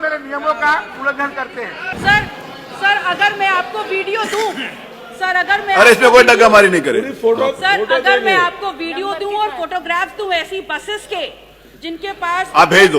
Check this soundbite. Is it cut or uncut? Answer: cut